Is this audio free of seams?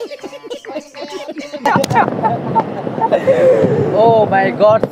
yes; 0 cuts

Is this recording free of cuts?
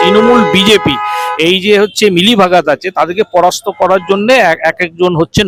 yes; 0 cuts

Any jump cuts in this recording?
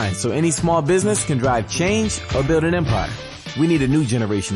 yes; 1 cut; at 3.4 s

